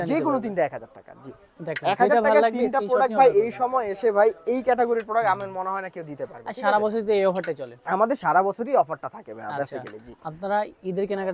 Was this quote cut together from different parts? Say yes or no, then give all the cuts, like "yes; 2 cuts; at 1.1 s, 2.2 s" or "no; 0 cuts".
no; 0 cuts